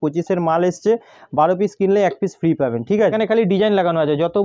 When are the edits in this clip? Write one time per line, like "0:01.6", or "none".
0:03.1

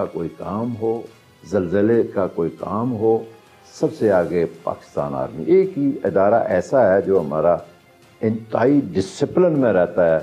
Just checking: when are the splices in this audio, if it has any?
none

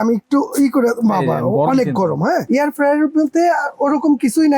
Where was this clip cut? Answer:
0:02.6

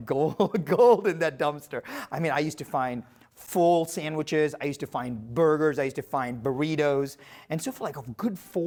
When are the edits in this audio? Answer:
none

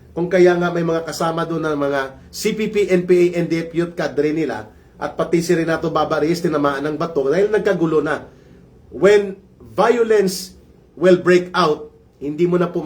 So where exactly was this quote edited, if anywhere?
none

